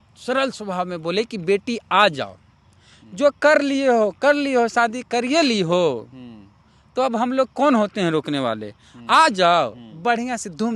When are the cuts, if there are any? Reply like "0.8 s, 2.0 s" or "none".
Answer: none